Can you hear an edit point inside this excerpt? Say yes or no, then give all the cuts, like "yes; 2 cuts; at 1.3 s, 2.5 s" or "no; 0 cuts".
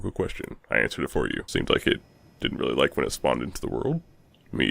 yes; 1 cut; at 1.4 s